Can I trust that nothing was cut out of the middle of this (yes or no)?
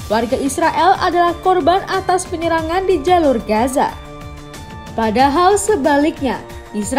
yes